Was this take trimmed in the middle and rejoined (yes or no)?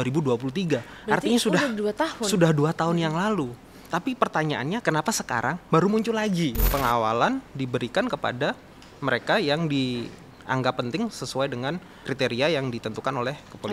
yes